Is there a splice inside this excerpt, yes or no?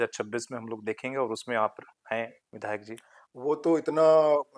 no